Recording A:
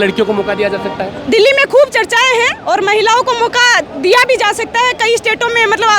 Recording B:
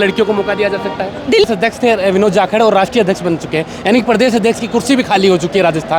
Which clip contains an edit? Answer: B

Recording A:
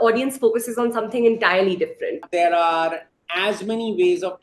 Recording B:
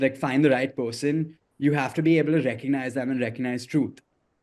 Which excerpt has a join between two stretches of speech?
A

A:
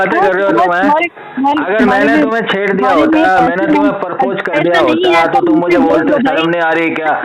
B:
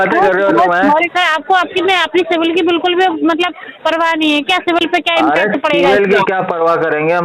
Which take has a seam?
B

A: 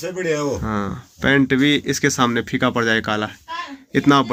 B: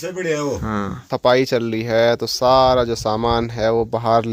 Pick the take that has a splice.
B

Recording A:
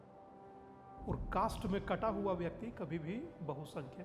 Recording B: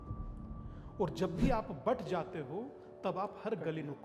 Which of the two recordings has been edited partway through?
A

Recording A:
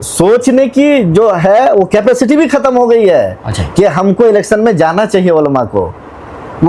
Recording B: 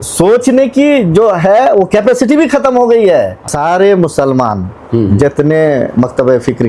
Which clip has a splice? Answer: B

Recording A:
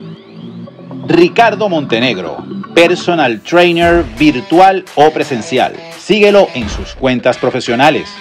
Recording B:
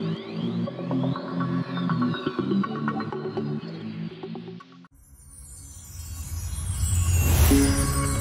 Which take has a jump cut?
A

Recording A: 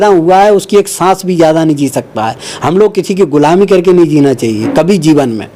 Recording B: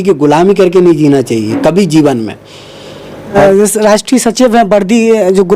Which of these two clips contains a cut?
B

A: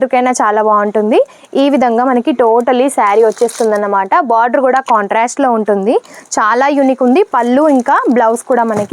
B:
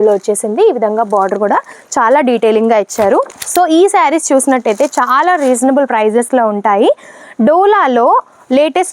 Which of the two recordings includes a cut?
B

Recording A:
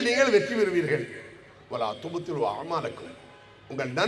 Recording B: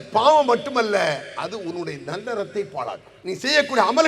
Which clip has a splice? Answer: B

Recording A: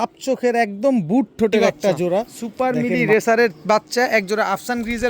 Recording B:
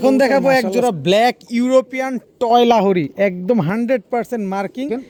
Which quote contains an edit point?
A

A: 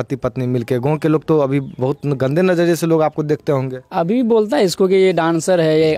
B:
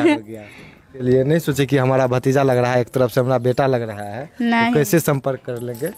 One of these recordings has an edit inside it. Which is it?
B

